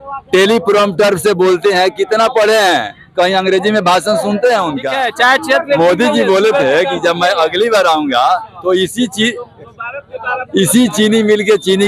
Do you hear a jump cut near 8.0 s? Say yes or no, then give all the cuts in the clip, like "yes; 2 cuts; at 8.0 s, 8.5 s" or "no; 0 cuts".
no; 1 cut; at 4.9 s